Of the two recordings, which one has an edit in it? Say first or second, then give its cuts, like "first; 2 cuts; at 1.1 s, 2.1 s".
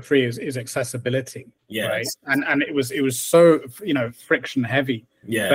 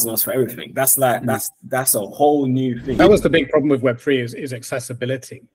second; 1 cut; at 3.0 s